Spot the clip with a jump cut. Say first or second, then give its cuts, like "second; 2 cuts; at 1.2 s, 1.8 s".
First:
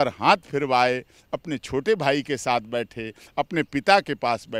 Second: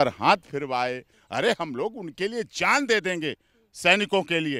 second; 1 cut; at 1.1 s